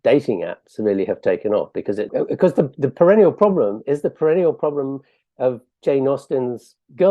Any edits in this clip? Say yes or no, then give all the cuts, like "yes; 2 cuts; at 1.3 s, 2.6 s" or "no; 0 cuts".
yes; 1 cut; at 2.1 s